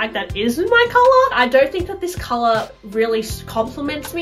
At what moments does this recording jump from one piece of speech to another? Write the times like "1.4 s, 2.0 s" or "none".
1.3 s